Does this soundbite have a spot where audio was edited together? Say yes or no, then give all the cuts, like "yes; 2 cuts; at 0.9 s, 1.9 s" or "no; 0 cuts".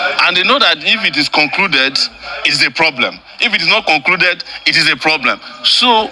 no; 0 cuts